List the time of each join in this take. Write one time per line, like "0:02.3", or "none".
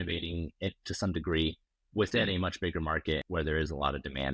0:03.3